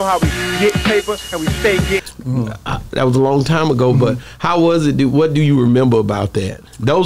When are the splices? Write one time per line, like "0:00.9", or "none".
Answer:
none